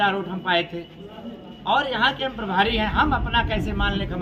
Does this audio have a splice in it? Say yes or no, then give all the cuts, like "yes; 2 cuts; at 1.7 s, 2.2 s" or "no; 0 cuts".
no; 0 cuts